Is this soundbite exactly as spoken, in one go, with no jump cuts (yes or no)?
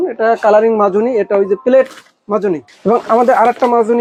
yes